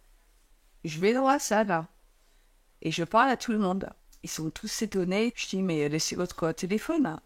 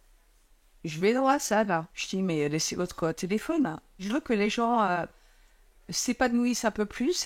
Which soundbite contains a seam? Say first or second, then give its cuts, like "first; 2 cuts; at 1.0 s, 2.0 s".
second; 2 cuts; at 2.0 s, 4.0 s